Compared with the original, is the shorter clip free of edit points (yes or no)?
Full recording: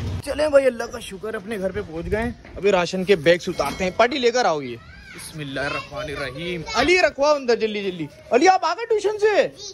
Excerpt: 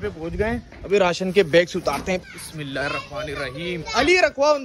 no